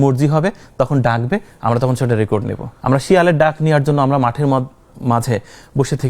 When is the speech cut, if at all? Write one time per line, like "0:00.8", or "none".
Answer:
0:02.7